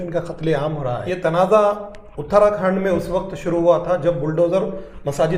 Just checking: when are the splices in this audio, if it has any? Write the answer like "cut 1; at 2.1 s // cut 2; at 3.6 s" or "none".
cut 1; at 1.0 s